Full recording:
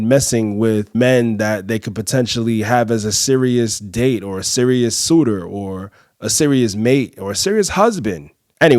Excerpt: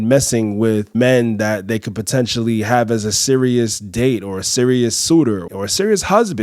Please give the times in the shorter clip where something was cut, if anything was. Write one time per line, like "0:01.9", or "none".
0:05.5